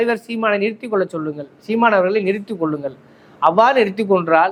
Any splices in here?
no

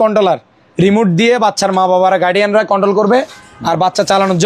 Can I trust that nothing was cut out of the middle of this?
yes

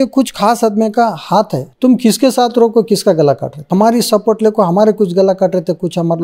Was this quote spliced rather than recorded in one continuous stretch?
yes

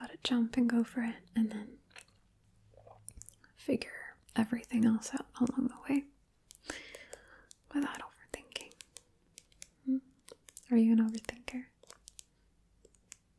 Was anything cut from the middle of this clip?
no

